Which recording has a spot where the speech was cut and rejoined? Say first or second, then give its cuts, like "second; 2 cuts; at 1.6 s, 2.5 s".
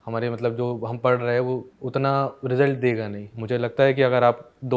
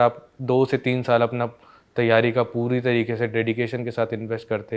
first; 2 cuts; at 1.7 s, 3.3 s